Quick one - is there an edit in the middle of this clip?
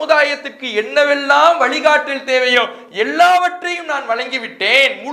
no; 0 cuts

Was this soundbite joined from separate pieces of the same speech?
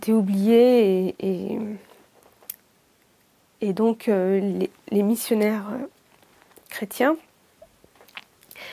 no; 0 cuts

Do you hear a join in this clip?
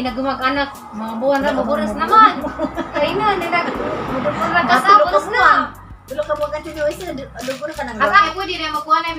yes; 2 cuts; at 3.0 s, 8.3 s

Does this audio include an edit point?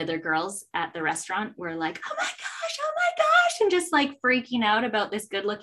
no; 0 cuts

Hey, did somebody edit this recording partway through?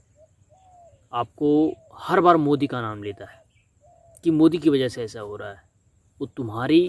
no; 0 cuts

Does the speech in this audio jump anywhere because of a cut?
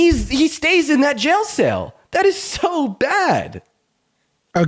no; 0 cuts

